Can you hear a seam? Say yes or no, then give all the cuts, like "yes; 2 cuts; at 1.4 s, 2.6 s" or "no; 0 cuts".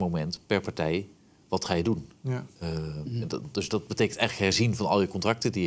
no; 0 cuts